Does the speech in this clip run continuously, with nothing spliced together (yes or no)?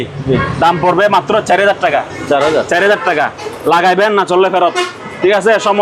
yes